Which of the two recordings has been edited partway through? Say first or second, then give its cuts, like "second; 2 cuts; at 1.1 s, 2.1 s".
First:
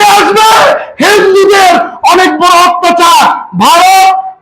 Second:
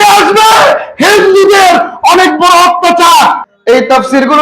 second; 1 cut; at 3.5 s